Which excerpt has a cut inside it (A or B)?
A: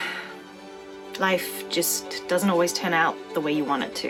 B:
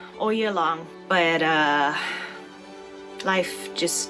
B